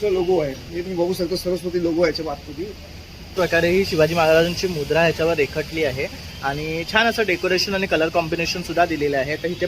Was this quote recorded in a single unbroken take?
no; 1 cut; at 3.4 s

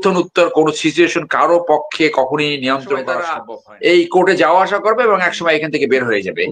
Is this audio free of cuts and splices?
no; 1 cut; at 3.4 s

